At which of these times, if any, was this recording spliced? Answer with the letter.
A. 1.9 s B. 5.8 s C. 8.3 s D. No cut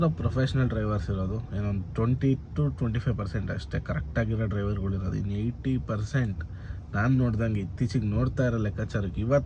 D